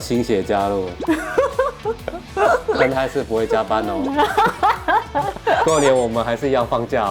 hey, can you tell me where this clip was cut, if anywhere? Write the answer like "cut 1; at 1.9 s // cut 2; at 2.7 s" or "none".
none